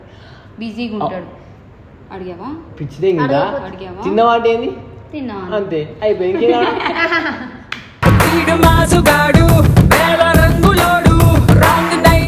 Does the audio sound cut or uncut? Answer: uncut